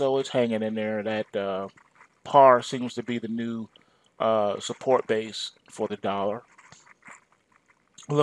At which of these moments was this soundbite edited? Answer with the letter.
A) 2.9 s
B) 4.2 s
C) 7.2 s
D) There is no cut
A